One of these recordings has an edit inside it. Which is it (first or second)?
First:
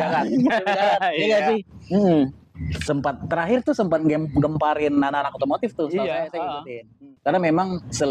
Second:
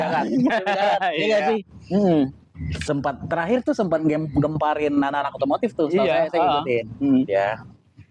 first